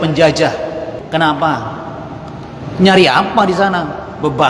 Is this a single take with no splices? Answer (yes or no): no